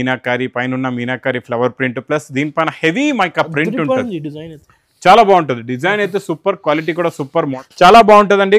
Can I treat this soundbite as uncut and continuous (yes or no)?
no